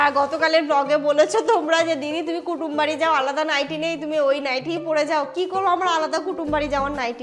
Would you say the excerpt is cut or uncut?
uncut